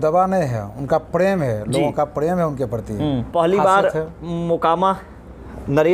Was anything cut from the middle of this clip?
yes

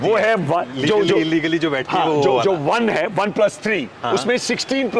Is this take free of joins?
yes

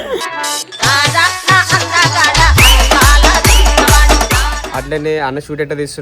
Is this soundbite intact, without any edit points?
no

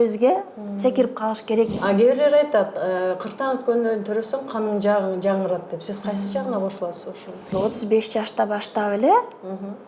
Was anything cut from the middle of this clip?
yes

